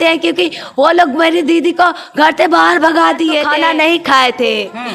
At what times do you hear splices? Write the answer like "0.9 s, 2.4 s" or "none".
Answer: 3.5 s